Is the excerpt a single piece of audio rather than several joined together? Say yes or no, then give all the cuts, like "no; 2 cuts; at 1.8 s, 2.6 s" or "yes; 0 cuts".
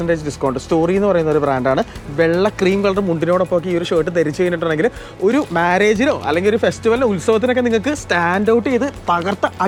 yes; 0 cuts